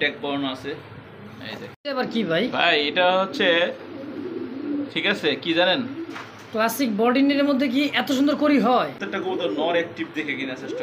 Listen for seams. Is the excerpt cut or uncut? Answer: cut